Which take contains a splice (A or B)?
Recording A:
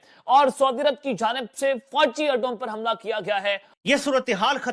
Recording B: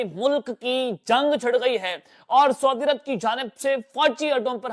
A